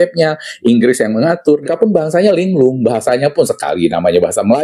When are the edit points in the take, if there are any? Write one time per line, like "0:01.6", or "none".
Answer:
0:01.7